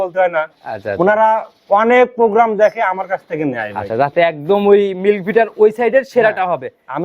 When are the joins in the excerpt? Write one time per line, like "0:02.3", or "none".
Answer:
none